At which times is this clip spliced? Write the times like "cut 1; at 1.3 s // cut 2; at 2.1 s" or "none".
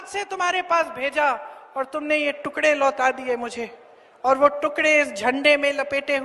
none